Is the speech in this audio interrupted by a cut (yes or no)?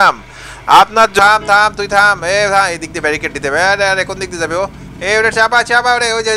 yes